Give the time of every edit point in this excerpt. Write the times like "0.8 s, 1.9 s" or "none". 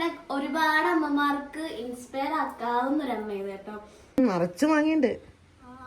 4.2 s